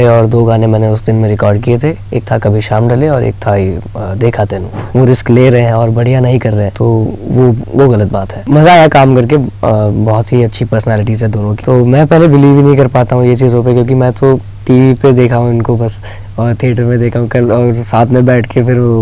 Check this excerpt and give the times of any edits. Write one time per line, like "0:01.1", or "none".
0:04.7
0:06.7
0:08.3
0:11.6